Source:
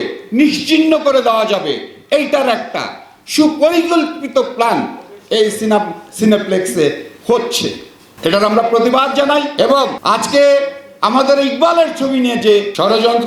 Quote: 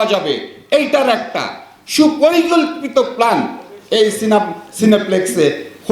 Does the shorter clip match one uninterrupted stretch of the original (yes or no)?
yes